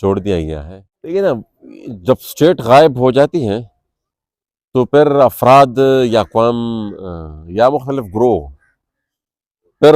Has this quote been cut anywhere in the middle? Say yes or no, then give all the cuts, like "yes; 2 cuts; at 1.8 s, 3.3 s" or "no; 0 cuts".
yes; 1 cut; at 1.1 s